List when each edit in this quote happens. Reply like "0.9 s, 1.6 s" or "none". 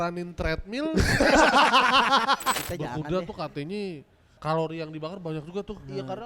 2.6 s, 4.3 s

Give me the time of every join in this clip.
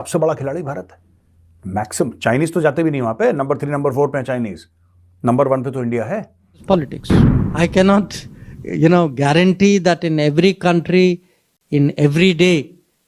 6.6 s

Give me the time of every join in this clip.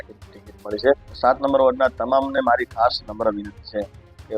1.1 s

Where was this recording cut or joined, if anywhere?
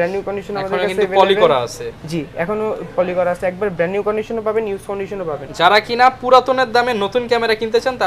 none

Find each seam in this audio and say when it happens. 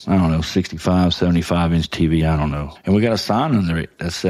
2.7 s

